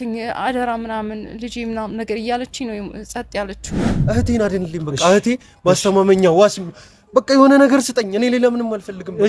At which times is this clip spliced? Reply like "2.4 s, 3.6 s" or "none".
3.9 s